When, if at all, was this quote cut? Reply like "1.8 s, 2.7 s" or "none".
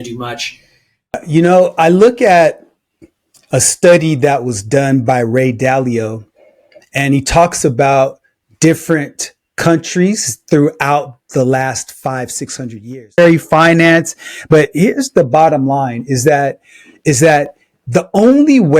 1.1 s, 13.2 s